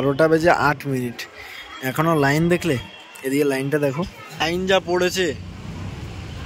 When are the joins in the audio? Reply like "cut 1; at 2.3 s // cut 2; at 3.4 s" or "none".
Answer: cut 1; at 4.4 s